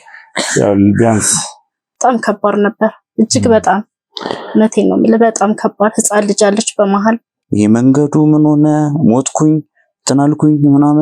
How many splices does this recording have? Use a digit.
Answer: 2